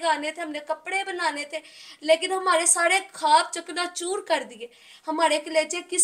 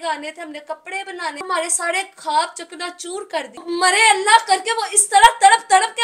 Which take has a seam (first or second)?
second